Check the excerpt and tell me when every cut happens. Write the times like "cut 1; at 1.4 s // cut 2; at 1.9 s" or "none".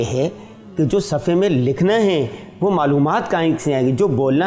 none